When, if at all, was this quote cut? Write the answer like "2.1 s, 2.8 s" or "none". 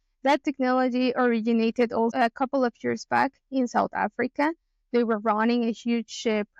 2.1 s